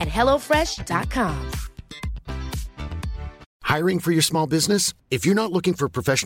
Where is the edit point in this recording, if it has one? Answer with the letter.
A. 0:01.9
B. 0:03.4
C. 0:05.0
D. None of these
B